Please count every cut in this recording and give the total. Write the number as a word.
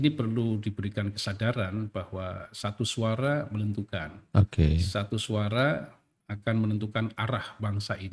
zero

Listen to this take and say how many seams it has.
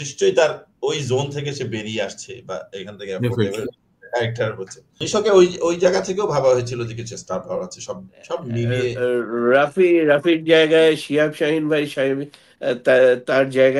one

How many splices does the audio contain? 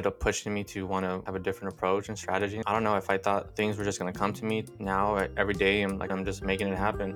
five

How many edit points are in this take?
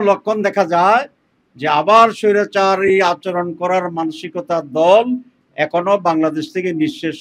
zero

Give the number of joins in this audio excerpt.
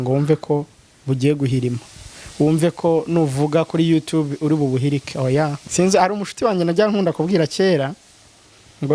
one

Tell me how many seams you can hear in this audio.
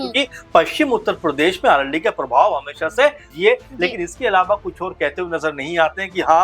one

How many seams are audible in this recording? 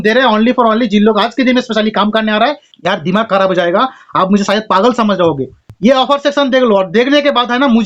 two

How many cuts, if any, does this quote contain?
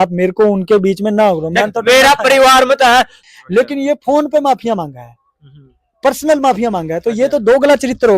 one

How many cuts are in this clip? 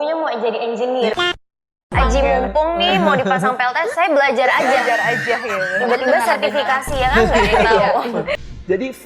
two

